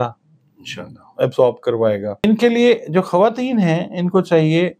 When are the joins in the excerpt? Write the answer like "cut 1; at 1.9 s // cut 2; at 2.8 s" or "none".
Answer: cut 1; at 2.2 s

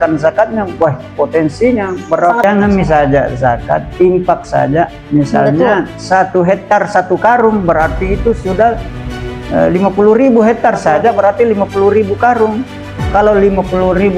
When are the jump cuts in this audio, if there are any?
cut 1; at 2.4 s

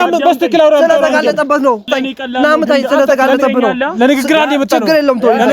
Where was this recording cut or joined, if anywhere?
cut 1; at 1.9 s

